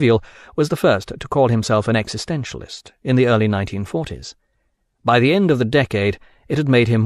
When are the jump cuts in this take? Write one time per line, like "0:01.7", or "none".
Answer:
0:05.9

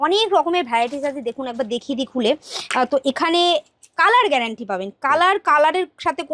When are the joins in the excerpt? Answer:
none

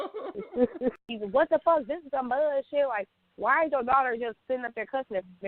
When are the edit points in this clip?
0:01.0

